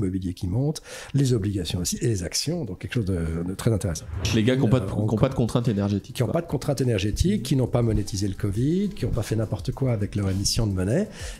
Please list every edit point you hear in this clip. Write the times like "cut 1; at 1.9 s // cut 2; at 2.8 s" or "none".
cut 1; at 3.9 s

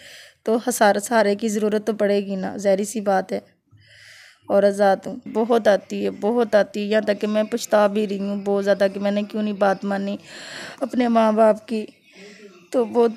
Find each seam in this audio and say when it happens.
cut 1; at 5.3 s

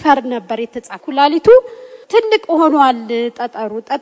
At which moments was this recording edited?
cut 1; at 1.0 s // cut 2; at 1.9 s

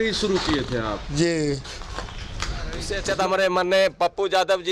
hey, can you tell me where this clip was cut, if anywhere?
cut 1; at 2.9 s

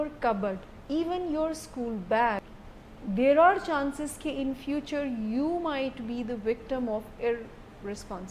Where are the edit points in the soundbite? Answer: cut 1; at 2.6 s

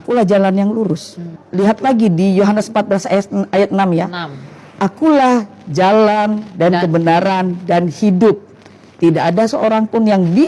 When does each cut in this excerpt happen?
cut 1; at 1.4 s

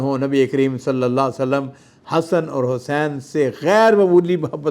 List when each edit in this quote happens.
none

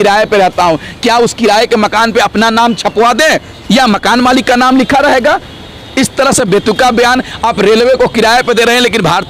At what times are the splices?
none

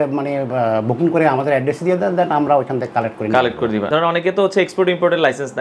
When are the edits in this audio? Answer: cut 1; at 3.9 s

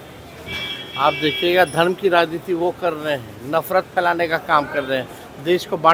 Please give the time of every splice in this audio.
none

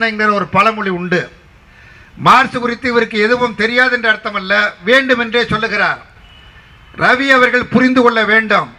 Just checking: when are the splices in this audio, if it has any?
none

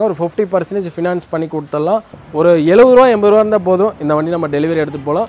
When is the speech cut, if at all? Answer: cut 1; at 2.2 s

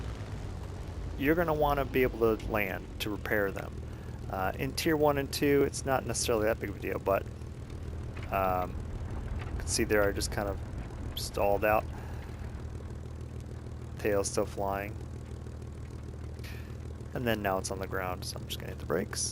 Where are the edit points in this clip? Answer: cut 1; at 1.1 s

